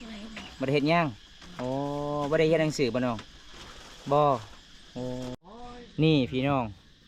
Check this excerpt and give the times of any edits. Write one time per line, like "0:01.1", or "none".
0:05.4